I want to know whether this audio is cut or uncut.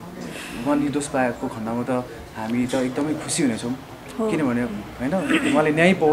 uncut